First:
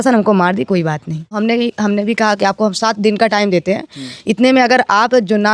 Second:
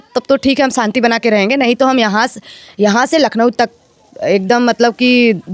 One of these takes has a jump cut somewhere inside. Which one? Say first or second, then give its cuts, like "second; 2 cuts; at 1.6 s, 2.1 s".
first; 1 cut; at 1.4 s